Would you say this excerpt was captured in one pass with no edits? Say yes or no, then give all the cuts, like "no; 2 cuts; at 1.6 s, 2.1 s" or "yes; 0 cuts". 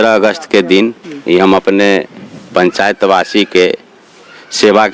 yes; 0 cuts